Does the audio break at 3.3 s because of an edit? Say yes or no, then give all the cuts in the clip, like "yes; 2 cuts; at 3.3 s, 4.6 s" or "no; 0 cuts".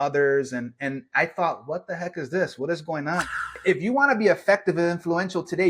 yes; 1 cut; at 3.3 s